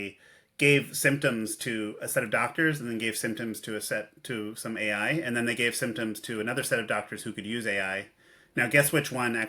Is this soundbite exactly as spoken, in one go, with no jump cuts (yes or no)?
yes